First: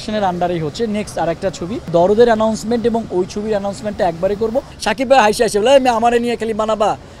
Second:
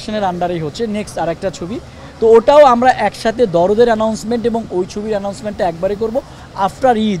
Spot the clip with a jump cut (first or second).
first